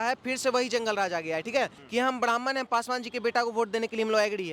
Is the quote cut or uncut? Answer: cut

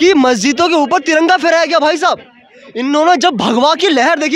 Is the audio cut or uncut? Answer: uncut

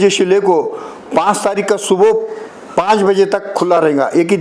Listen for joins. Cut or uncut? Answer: uncut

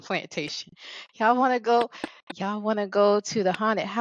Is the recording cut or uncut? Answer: uncut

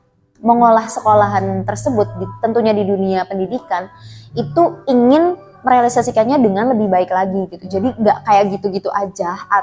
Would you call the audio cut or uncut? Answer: uncut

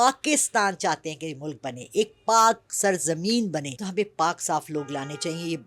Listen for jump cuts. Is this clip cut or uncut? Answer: cut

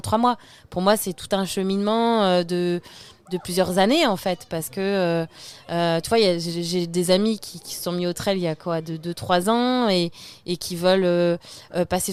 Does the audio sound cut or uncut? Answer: uncut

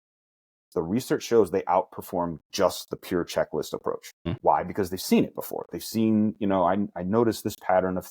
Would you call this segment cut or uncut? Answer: cut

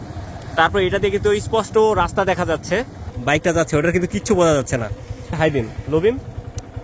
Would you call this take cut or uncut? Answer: cut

